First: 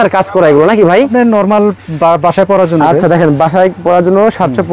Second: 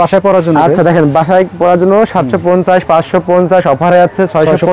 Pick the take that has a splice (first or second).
first